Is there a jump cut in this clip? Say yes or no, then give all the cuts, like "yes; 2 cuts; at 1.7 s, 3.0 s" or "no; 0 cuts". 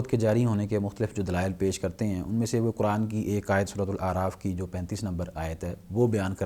no; 0 cuts